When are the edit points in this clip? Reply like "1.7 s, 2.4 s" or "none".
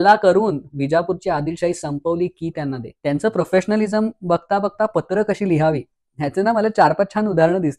2.9 s